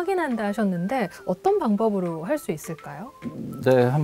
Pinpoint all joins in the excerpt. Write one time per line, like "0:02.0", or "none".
none